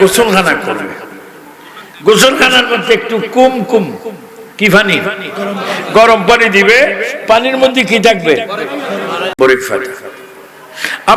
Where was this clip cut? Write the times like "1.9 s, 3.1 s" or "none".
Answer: 9.3 s